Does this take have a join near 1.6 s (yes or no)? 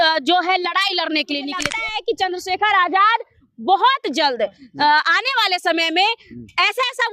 yes